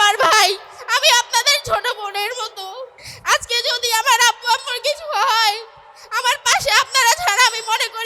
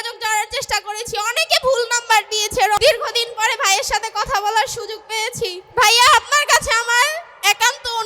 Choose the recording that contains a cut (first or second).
second